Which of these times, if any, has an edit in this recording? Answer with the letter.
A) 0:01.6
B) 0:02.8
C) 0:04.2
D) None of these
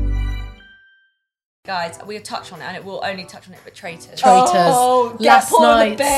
A